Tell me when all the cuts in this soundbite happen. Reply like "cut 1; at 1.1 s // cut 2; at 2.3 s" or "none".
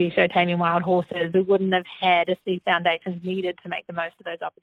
cut 1; at 1.3 s

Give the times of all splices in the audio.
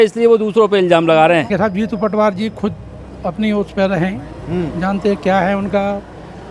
cut 1; at 1.5 s

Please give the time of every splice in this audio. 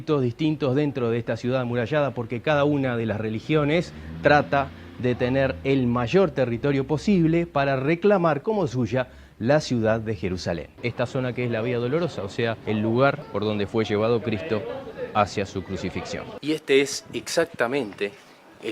cut 1; at 10.6 s // cut 2; at 12.6 s // cut 3; at 13.3 s // cut 4; at 16.2 s

